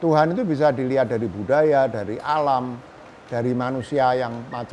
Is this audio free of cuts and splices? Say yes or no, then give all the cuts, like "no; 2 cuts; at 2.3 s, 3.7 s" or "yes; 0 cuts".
yes; 0 cuts